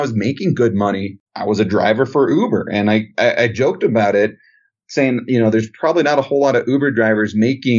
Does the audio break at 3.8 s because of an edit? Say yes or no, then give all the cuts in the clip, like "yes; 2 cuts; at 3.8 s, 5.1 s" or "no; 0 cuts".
no; 1 cut; at 1.2 s